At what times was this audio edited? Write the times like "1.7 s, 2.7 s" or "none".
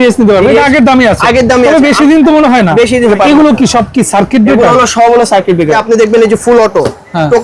3.1 s, 5.8 s